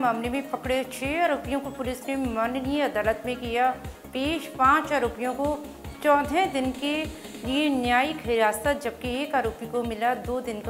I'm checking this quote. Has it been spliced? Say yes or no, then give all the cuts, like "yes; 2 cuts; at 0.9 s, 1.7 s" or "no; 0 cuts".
no; 0 cuts